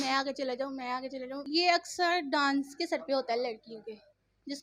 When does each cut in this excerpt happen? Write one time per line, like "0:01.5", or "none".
0:01.4